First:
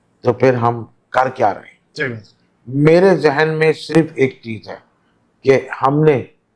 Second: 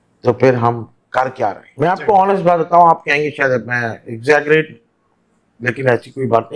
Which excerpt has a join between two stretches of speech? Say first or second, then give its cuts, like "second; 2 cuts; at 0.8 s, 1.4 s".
second; 1 cut; at 1.6 s